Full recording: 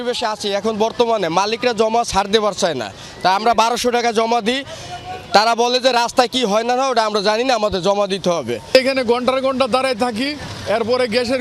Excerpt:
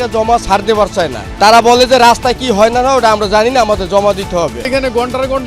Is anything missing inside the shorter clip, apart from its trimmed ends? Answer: yes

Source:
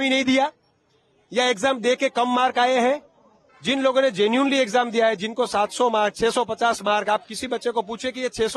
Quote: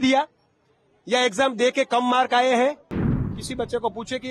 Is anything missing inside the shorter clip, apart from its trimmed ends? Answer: yes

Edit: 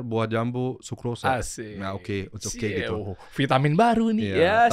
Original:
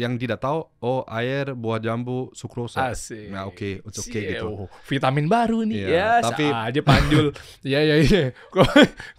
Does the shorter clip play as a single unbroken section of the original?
yes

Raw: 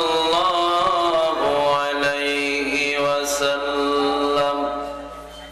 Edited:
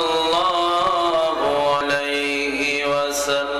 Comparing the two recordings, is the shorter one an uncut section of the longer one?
no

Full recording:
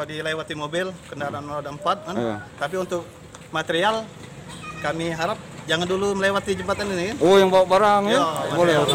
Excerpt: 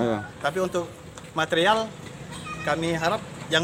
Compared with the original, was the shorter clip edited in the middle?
no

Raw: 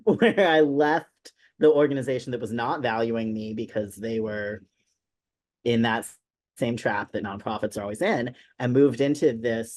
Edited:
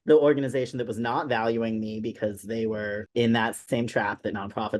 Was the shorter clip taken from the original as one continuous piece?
no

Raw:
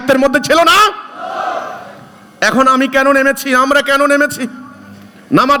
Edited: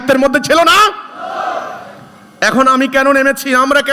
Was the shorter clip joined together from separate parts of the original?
no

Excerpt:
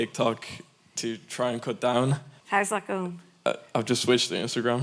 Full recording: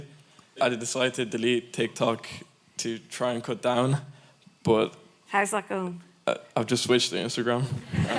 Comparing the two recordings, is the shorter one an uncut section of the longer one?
no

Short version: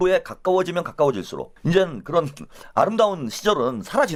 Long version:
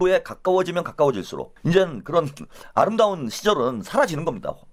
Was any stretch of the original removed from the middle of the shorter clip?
no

